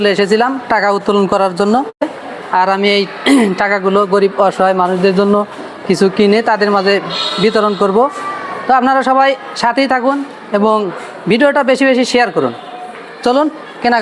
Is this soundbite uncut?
no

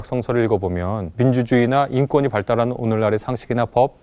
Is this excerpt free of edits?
no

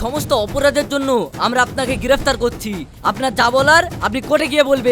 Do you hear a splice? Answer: no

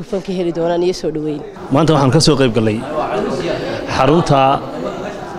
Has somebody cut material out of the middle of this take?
no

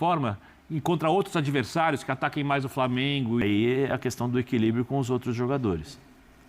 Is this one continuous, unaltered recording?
no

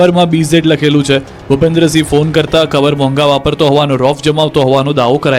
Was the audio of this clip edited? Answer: no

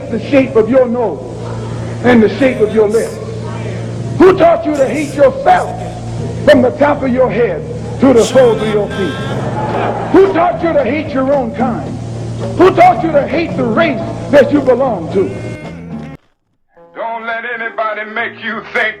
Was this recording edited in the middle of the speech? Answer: yes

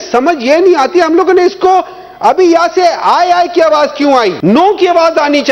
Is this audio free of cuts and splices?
no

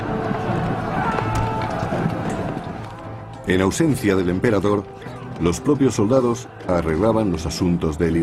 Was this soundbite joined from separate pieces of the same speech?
yes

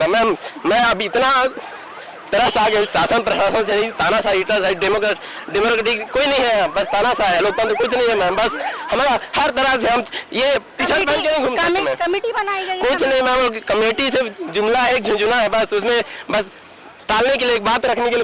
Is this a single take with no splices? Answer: yes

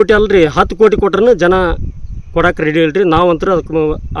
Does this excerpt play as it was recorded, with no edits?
yes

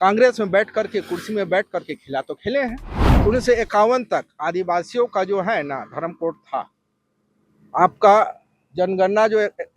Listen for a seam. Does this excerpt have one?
yes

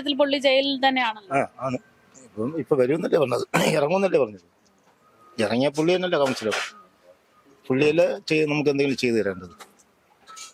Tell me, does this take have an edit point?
no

